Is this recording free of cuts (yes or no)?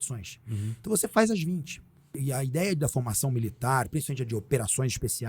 no